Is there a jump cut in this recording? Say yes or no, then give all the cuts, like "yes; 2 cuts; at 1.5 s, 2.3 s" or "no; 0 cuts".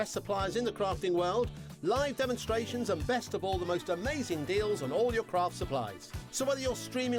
no; 0 cuts